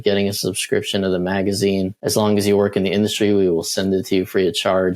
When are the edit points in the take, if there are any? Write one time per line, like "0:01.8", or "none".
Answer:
0:02.0